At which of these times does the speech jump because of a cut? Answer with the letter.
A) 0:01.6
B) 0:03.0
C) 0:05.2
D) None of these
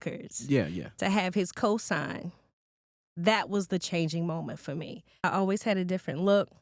C